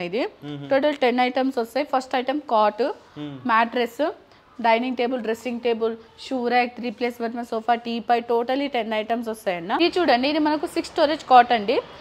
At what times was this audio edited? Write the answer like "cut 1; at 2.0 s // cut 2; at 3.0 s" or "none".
cut 1; at 9.8 s